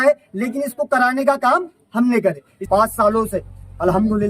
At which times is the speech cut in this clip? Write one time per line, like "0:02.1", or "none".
0:02.6